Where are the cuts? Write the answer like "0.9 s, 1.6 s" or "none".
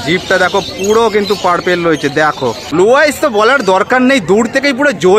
2.7 s